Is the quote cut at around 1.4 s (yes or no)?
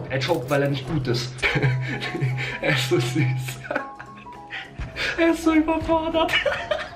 yes